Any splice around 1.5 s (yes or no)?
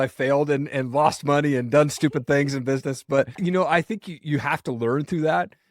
no